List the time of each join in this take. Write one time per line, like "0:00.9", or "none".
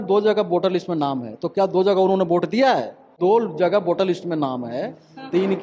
0:03.1